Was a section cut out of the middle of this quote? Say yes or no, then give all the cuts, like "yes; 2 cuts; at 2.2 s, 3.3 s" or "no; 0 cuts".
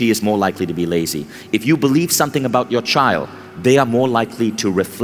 no; 0 cuts